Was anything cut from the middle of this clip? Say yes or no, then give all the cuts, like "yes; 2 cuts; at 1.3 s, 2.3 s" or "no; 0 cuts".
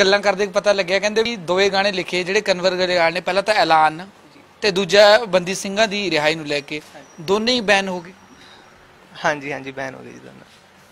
yes; 1 cut; at 1.3 s